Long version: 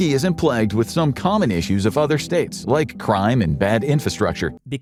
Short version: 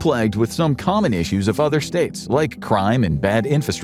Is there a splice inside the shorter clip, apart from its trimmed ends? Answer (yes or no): no